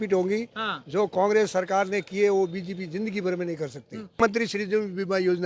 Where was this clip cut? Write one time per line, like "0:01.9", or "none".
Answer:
0:04.2